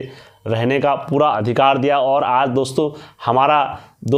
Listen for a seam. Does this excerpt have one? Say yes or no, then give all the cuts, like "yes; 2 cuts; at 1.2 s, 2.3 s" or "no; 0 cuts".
no; 0 cuts